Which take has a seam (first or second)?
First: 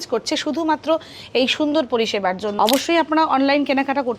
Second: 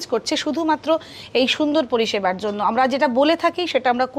first